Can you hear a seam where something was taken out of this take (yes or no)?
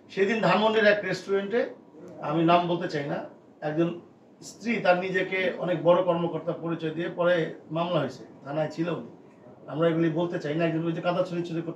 no